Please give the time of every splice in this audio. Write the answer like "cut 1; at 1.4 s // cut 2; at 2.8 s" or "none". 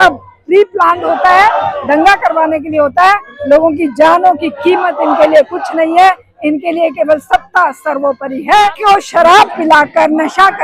cut 1; at 8.8 s